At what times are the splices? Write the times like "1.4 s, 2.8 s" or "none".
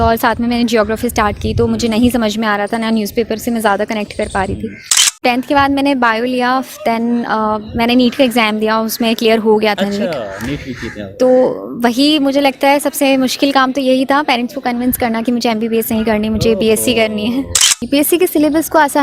5.1 s, 17.7 s